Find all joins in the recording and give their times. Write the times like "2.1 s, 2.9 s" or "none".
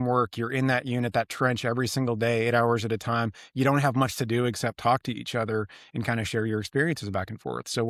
none